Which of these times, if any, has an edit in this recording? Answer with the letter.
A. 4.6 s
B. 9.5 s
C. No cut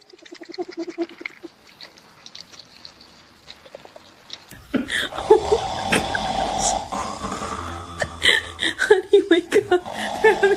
A